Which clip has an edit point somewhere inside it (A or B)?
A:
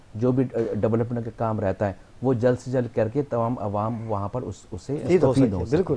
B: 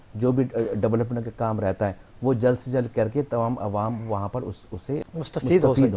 A